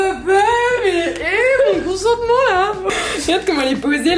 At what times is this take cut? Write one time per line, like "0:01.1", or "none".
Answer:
0:02.9